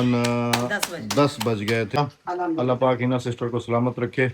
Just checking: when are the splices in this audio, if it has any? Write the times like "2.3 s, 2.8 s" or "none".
2.0 s